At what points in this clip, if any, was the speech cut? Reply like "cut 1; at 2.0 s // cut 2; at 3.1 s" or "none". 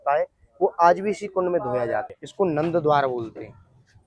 cut 1; at 2.1 s